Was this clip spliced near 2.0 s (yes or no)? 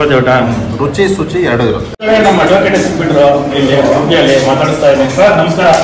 yes